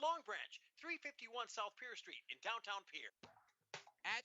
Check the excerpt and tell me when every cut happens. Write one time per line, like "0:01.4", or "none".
0:03.0